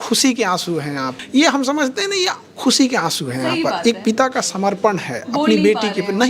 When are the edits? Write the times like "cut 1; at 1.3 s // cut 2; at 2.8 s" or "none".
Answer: cut 1; at 1.1 s